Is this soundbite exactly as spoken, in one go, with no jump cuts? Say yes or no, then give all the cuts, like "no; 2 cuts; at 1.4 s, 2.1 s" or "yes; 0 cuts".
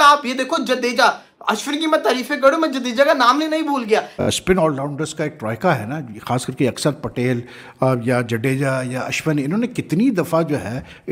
no; 1 cut; at 4.2 s